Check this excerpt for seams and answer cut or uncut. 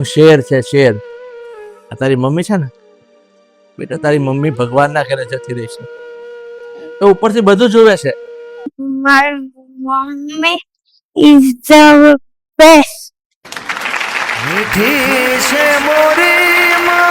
cut